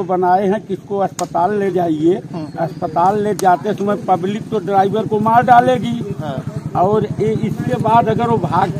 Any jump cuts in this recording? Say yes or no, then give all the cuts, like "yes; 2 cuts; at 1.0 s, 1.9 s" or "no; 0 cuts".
no; 0 cuts